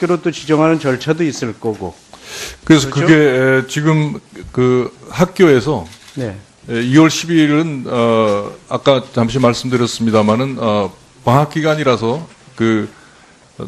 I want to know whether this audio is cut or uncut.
cut